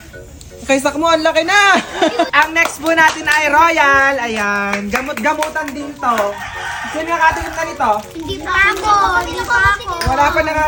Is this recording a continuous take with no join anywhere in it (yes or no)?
yes